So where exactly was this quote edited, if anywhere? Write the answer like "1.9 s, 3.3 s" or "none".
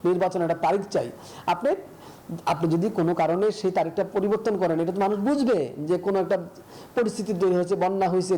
none